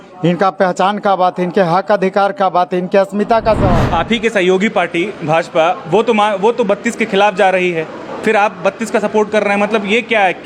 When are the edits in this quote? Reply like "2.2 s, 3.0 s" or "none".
3.7 s

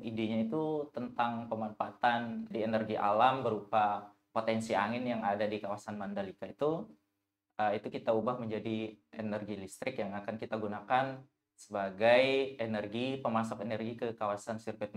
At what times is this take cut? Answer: 2.5 s

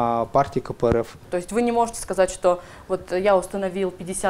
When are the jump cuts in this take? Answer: 1.2 s

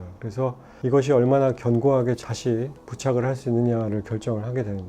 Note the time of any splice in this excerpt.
2.3 s

